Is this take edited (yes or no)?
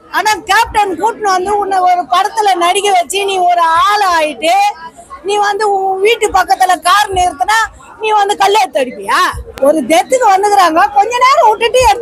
yes